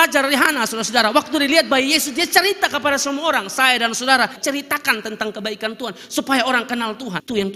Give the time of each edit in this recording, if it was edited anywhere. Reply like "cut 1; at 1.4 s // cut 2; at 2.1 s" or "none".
none